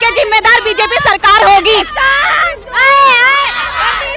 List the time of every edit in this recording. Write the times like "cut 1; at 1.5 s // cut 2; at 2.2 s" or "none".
none

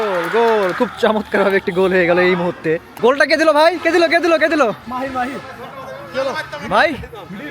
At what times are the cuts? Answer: cut 1; at 2.9 s

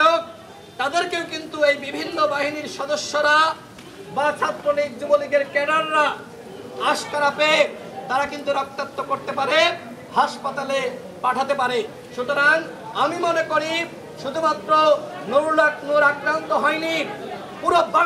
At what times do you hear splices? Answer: none

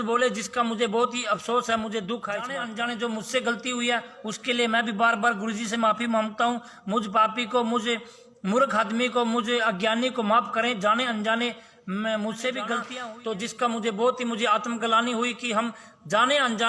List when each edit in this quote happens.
cut 1; at 2.6 s // cut 2; at 12.9 s

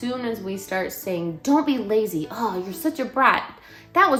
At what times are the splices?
none

